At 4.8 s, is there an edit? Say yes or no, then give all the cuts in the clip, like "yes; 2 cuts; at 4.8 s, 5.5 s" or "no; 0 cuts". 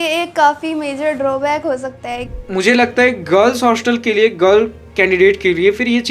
no; 1 cut; at 2.3 s